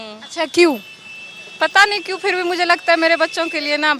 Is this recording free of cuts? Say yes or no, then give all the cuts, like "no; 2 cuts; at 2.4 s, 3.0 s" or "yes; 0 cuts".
yes; 0 cuts